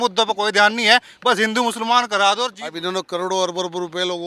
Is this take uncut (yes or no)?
no